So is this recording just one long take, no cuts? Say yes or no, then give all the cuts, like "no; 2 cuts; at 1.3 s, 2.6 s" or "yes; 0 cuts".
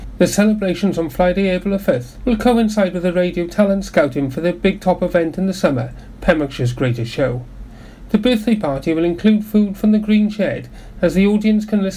yes; 0 cuts